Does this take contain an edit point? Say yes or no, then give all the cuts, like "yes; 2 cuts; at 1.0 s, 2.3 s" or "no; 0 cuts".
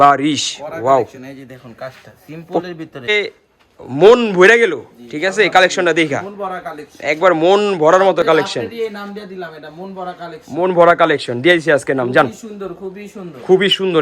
yes; 1 cut; at 3.1 s